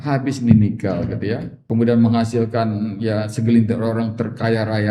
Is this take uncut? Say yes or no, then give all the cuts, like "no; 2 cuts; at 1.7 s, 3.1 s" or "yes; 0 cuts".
no; 1 cut; at 1.5 s